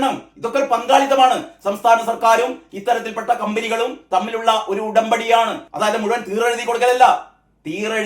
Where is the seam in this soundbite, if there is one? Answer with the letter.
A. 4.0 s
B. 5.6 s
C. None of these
B